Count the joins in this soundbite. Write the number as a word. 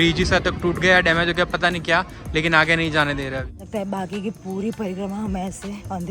one